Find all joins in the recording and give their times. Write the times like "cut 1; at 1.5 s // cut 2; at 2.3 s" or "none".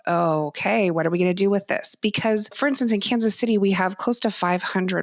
cut 1; at 2.5 s